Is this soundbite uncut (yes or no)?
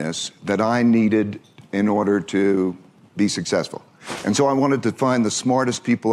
yes